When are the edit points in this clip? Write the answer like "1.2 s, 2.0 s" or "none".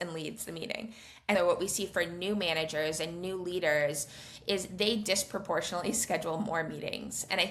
1.3 s